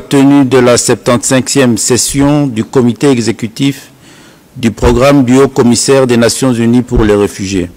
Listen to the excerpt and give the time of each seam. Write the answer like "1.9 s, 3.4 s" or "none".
none